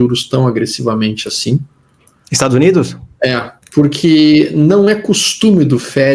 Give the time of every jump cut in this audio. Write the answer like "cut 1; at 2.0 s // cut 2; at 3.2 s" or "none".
cut 1; at 3.5 s